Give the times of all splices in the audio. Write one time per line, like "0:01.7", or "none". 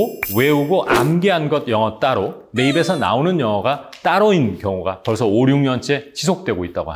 none